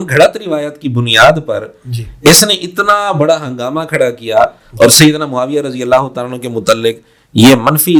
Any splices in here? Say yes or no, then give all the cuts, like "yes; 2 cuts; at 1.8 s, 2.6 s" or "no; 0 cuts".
no; 0 cuts